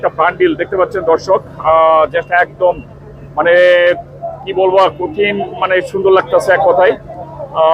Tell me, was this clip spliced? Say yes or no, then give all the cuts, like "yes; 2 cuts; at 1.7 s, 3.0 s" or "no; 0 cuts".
no; 0 cuts